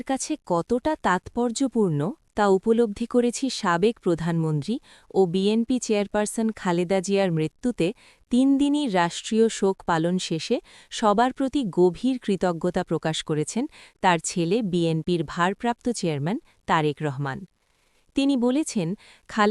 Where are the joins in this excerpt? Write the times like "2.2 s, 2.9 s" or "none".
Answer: none